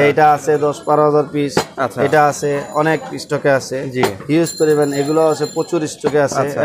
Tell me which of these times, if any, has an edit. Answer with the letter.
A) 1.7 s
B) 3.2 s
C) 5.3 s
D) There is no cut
D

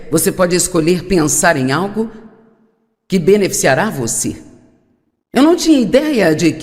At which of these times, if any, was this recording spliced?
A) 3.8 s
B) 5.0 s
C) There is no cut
A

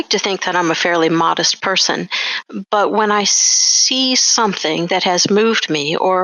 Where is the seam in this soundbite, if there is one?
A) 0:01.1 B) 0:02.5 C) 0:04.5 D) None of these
D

